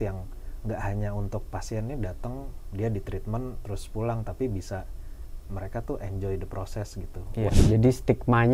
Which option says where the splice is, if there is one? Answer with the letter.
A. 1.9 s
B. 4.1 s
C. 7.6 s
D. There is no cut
C